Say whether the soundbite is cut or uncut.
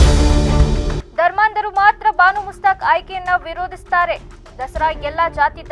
uncut